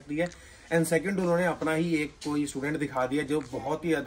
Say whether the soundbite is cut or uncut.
uncut